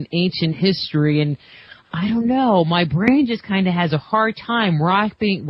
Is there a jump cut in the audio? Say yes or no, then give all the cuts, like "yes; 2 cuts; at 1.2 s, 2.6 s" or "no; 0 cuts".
yes; 1 cut; at 2.8 s